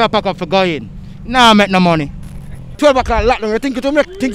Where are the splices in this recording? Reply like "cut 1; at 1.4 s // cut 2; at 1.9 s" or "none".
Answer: cut 1; at 2.7 s

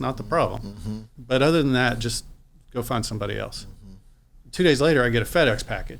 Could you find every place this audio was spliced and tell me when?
cut 1; at 1.1 s

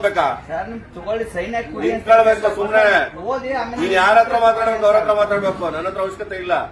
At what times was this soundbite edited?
none

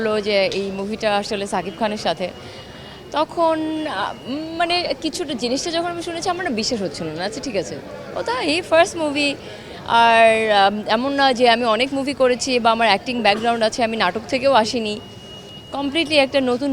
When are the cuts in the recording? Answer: none

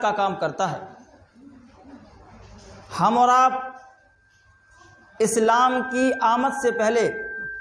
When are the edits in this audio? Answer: none

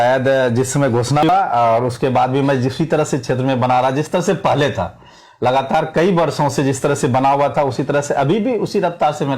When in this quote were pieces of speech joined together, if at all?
cut 1; at 1.3 s

